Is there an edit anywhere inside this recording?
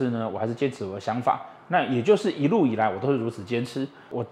no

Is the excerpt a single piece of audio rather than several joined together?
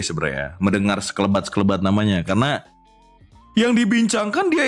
yes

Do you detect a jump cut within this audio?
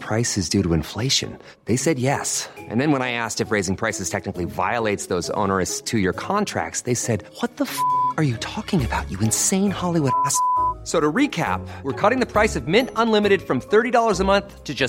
no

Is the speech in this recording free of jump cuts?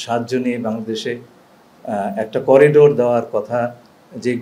yes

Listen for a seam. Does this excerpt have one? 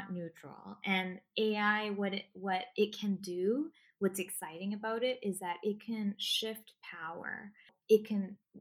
no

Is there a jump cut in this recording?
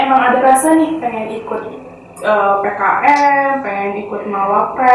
no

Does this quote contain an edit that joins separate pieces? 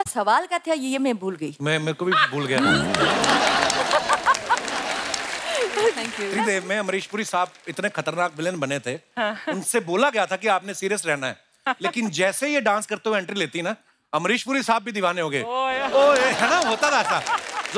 yes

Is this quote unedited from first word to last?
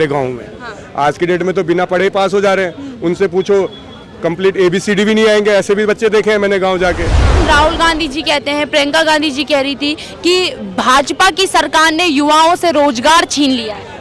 no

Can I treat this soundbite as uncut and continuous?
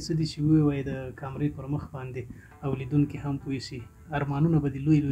yes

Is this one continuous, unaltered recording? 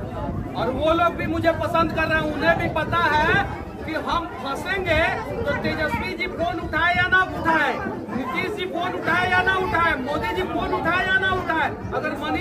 yes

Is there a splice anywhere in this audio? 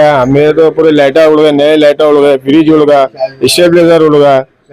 no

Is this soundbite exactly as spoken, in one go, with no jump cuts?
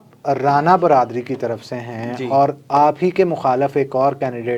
yes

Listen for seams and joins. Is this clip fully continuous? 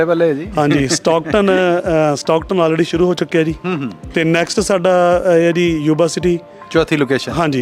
yes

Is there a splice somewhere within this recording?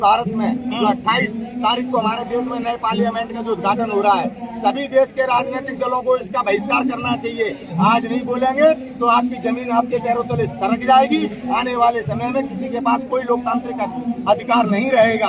no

